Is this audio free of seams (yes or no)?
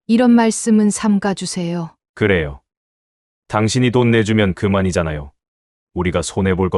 yes